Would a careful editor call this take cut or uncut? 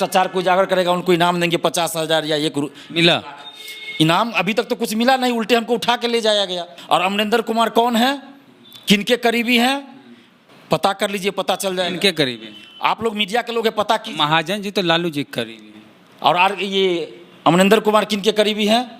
cut